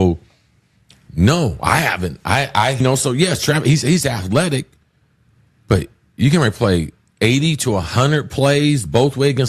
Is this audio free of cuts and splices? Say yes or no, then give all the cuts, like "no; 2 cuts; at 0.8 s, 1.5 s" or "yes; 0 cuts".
no; 1 cut; at 2.8 s